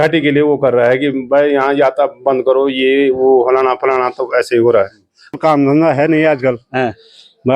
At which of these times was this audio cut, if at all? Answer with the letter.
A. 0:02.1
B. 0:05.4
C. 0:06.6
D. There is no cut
B